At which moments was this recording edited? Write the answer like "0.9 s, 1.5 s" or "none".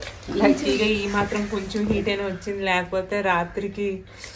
none